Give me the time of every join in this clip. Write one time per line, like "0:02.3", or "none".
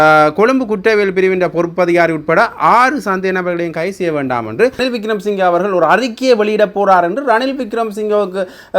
0:04.8